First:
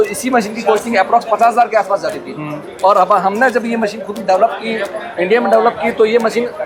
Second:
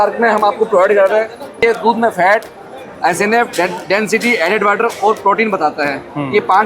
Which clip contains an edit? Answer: second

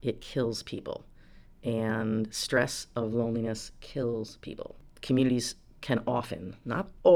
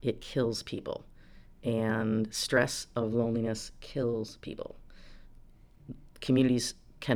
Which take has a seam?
first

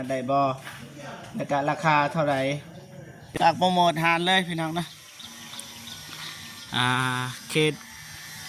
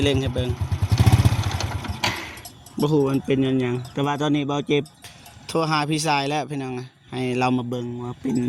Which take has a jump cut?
first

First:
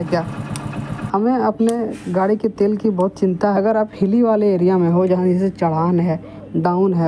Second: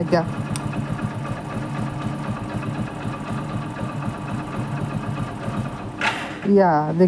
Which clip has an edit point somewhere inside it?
first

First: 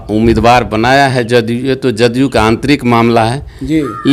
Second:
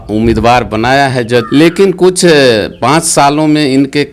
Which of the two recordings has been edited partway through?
second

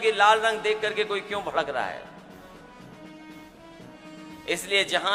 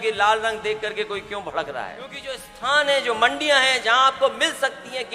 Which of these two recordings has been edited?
second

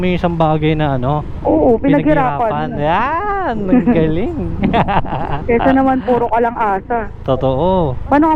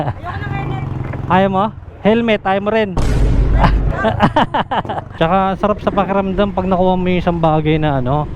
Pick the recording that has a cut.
second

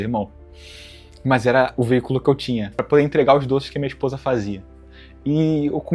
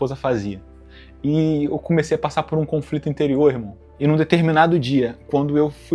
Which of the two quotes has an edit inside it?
first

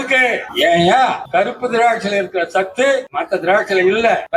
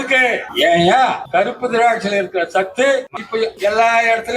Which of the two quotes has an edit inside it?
second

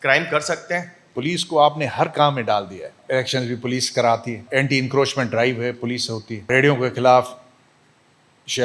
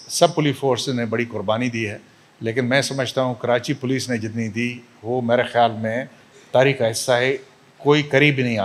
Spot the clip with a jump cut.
first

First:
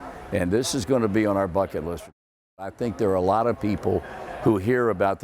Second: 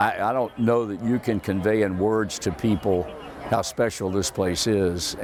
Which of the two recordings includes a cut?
first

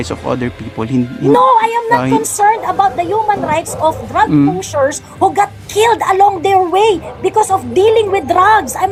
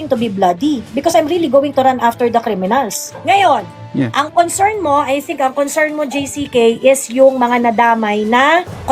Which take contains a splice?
second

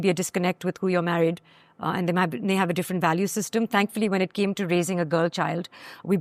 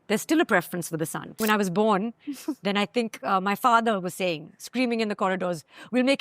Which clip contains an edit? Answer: second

